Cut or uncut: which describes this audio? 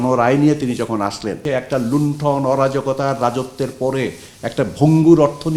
cut